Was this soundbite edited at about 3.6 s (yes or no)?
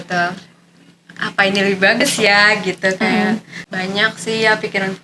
yes